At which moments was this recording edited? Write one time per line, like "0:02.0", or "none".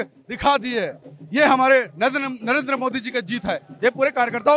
none